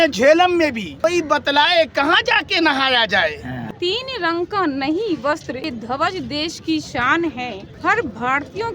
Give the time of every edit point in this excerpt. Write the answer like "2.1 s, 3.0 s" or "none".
0.9 s, 3.6 s, 5.7 s, 7.6 s